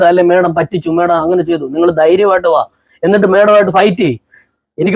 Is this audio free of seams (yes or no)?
yes